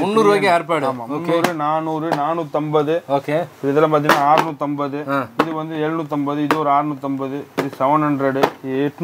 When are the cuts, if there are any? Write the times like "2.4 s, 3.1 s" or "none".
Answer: none